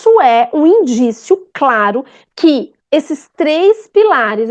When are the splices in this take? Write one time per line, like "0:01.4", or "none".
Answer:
0:02.2

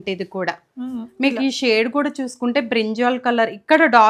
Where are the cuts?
none

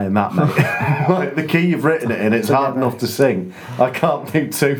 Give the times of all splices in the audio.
none

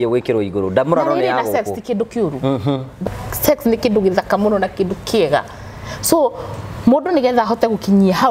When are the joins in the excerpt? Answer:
0:03.0

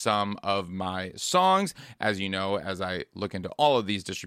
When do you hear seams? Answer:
none

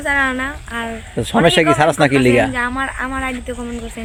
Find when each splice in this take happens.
none

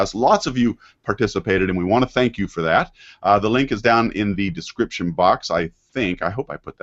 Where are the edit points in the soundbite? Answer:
0:05.8

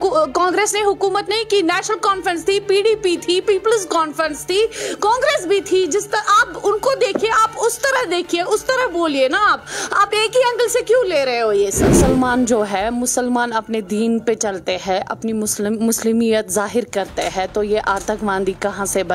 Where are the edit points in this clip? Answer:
0:11.9

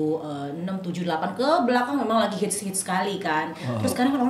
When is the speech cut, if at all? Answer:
none

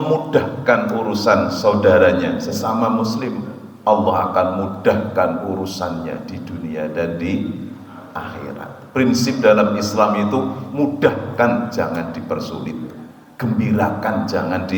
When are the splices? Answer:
none

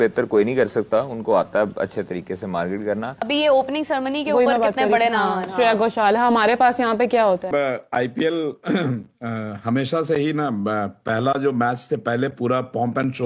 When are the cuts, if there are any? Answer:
0:03.2
0:07.5

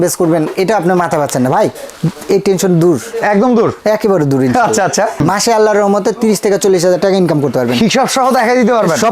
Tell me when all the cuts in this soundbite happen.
0:05.2

